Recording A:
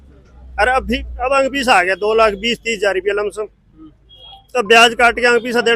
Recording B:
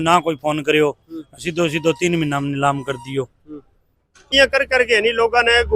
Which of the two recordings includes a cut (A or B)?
B